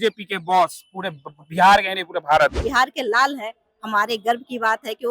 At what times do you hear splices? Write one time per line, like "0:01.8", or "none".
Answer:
0:02.6